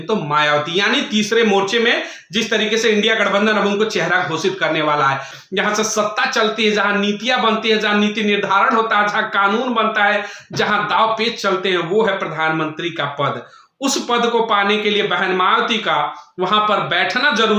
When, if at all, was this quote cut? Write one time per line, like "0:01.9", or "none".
0:05.3